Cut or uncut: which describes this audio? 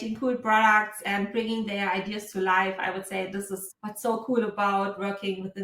cut